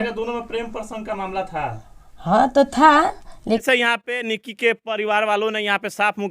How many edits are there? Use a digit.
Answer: 1